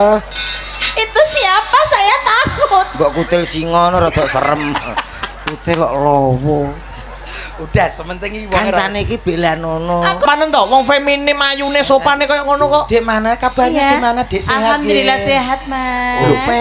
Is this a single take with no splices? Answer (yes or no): no